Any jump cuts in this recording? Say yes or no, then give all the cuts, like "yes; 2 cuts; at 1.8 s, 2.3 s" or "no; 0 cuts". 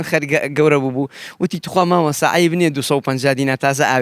no; 0 cuts